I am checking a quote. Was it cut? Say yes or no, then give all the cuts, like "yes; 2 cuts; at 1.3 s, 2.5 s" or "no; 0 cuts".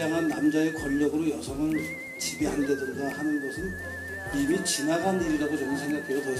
yes; 1 cut; at 5.2 s